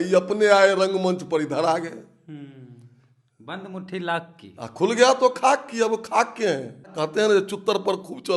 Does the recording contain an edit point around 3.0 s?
no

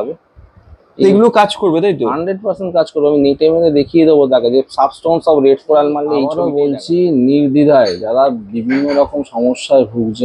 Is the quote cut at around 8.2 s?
no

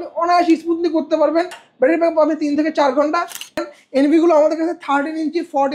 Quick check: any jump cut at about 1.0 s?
no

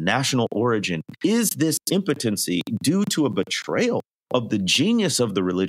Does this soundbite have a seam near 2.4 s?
no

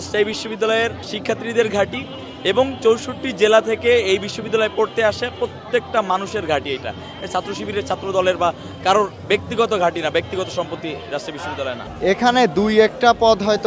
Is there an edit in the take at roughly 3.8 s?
no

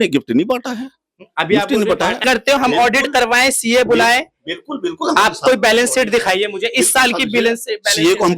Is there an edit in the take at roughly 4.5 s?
no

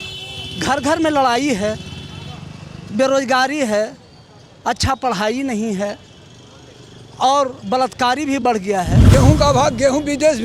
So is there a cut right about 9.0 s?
yes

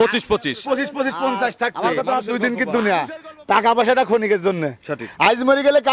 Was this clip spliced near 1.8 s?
yes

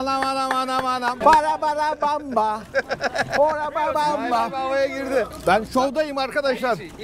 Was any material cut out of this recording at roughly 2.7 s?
no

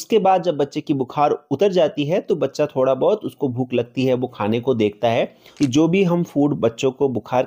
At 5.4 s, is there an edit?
yes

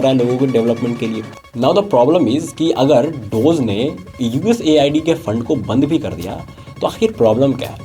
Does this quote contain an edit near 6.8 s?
no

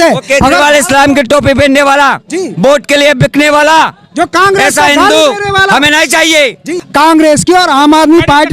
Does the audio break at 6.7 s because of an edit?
yes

